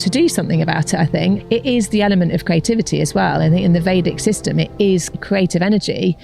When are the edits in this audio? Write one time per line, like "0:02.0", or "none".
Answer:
0:01.4
0:05.1